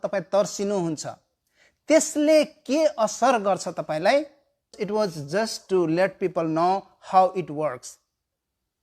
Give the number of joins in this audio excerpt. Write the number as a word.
one